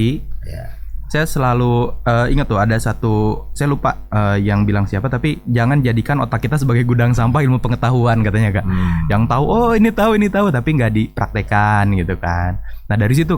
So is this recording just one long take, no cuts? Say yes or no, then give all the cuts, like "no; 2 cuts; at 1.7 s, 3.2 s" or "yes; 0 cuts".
yes; 0 cuts